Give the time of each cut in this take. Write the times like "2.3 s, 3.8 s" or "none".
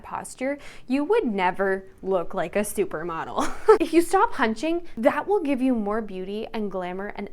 3.8 s, 4.9 s